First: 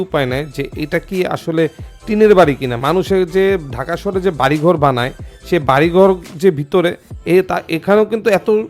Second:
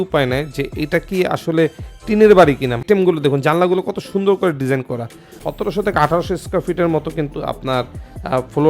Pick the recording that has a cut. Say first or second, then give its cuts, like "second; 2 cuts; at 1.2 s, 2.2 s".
second; 2 cuts; at 2.8 s, 5.4 s